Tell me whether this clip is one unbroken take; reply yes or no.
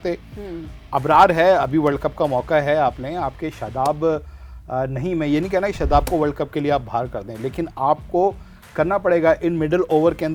yes